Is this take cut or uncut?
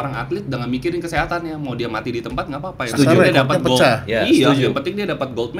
uncut